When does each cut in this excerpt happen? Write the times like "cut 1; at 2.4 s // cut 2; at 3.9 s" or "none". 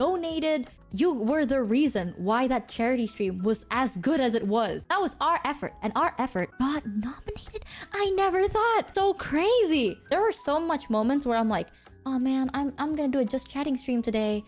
cut 1; at 4.8 s // cut 2; at 6.5 s // cut 3; at 8.9 s // cut 4; at 10.0 s

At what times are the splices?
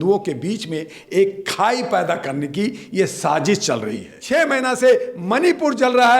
cut 1; at 4.1 s

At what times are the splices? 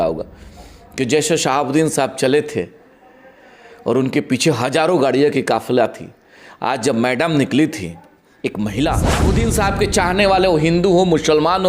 cut 1; at 9.2 s

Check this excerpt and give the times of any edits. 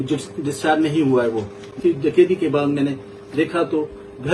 cut 1; at 1.8 s

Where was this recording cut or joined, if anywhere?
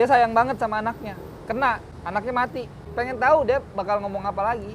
cut 1; at 1.9 s // cut 2; at 2.8 s

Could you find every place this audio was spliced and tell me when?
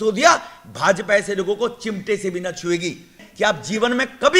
cut 1; at 3.2 s

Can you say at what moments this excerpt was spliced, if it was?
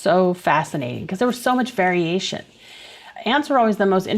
cut 1; at 3.0 s

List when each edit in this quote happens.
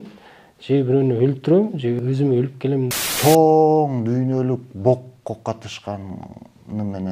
cut 1; at 2.0 s // cut 2; at 2.9 s

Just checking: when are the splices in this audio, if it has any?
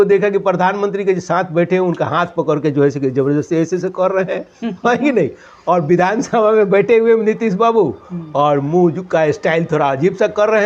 none

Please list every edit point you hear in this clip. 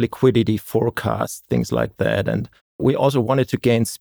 none

